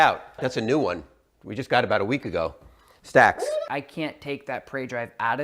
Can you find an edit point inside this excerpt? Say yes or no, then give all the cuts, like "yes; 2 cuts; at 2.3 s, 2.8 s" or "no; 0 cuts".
yes; 1 cut; at 3.7 s